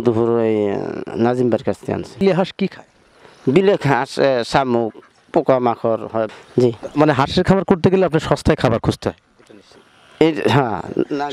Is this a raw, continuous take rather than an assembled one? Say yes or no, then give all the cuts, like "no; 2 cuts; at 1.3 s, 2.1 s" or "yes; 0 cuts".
no; 2 cuts; at 2.2 s, 6.4 s